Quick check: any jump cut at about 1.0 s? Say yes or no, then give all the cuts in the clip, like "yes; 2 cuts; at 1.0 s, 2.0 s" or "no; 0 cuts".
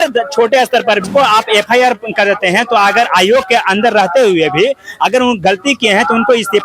yes; 1 cut; at 1.0 s